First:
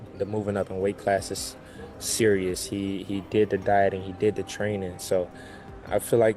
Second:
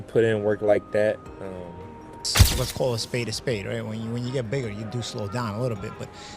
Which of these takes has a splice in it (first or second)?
second